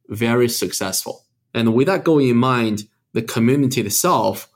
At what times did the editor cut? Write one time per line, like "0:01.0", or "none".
0:01.4

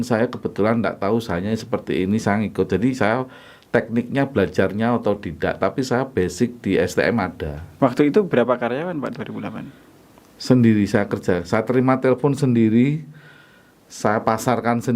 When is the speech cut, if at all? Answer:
0:07.6

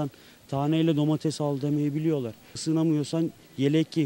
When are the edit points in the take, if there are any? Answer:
0:02.5

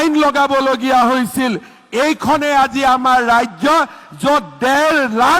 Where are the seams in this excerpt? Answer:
none

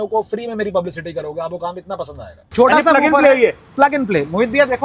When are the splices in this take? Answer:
0:02.3

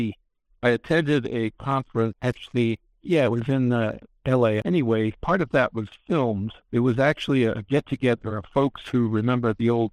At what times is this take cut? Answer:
0:02.2
0:04.6
0:06.5

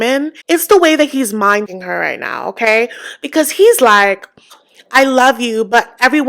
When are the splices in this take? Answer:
0:01.7

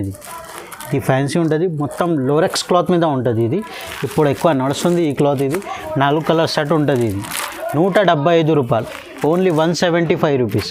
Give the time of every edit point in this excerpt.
none

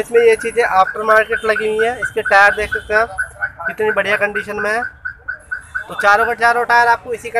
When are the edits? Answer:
none

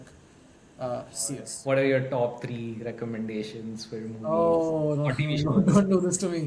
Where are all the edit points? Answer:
0:01.5

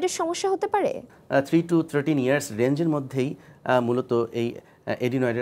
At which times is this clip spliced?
0:01.1

